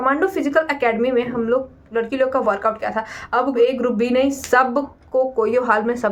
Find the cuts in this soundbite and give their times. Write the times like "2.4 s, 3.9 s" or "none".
none